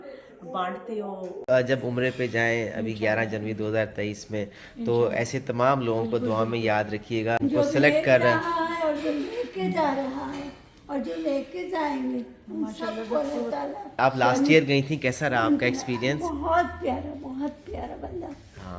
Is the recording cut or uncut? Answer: cut